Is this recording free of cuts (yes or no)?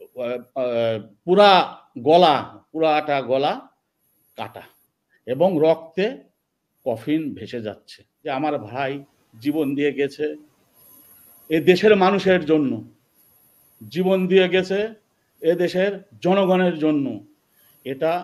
no